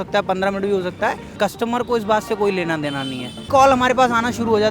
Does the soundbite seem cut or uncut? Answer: cut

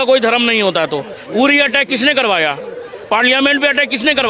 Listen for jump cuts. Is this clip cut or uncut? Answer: uncut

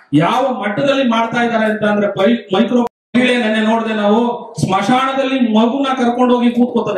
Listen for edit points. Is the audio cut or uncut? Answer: cut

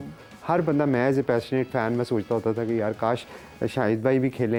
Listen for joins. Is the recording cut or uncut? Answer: uncut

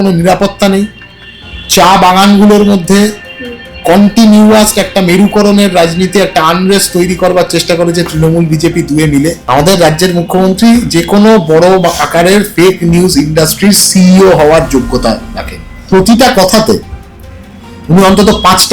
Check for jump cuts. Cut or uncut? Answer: cut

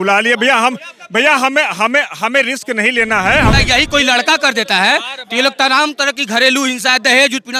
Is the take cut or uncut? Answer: cut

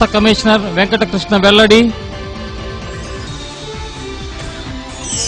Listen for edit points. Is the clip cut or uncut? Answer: uncut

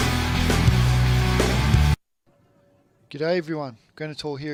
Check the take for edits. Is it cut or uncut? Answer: uncut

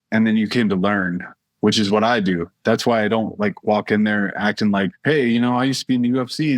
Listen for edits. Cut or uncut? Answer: cut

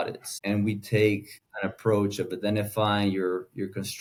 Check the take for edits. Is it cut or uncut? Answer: uncut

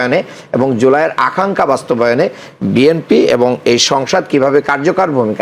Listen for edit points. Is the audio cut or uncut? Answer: uncut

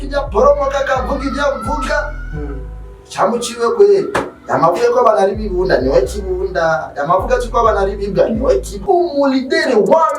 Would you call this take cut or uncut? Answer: cut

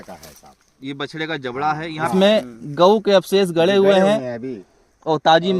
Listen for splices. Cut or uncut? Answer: cut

